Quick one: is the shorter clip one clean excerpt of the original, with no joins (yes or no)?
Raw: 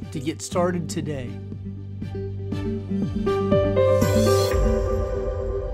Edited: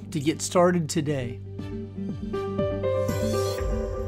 no